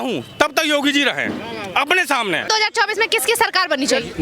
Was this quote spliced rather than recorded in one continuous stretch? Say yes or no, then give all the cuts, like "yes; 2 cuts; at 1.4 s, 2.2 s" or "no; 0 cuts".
yes; 1 cut; at 2.5 s